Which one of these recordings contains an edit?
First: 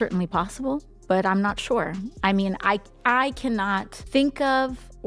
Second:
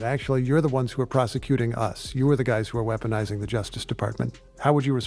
first; 1 cut; at 3.9 s

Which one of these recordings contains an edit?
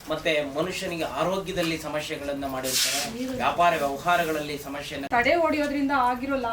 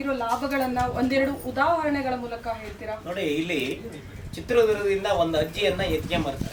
first; 1 cut; at 5.1 s

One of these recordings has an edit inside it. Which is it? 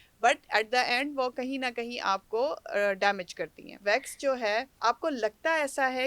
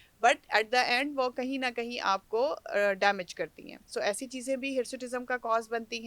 first; 1 cut; at 3.8 s

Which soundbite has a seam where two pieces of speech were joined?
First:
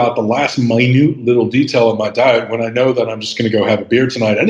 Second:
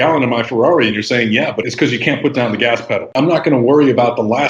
second; 2 cuts; at 1.6 s, 3.1 s

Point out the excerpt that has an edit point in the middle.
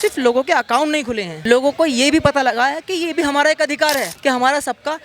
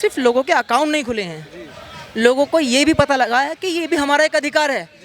first; 2 cuts; at 1.3 s, 4.1 s

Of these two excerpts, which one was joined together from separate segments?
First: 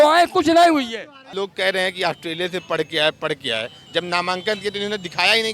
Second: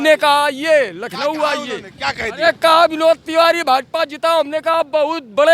first; 1 cut; at 1.2 s

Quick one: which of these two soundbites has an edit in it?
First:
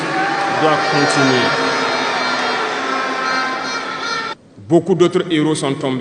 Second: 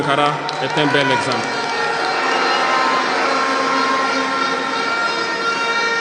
first; 1 cut; at 4.3 s

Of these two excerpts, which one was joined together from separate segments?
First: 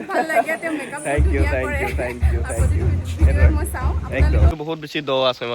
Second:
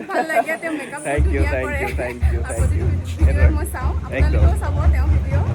first; 1 cut; at 4.5 s

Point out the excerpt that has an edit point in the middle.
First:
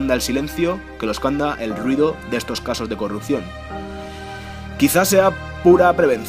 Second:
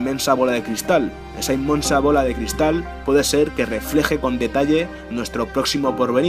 first; 1 cut; at 2.4 s

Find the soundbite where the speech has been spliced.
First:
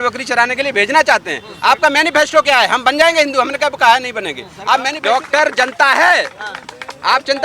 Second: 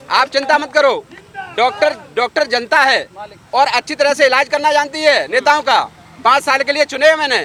first; 1 cut; at 4.9 s

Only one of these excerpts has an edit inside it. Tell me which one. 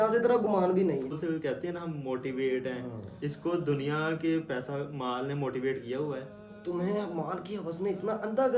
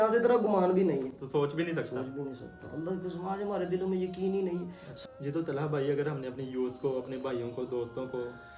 first; 2 cuts; at 1.2 s, 6.5 s

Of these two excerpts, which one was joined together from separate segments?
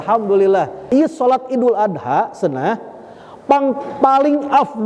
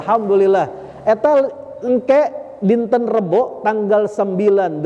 first; 1 cut; at 0.9 s

